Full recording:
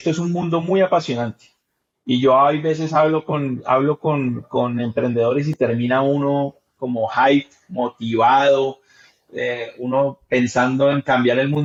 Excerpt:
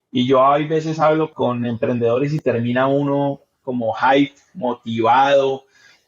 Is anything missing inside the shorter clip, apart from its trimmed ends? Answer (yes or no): yes